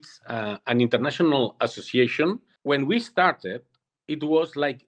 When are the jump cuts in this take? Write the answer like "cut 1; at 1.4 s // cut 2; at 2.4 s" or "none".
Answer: cut 1; at 2.5 s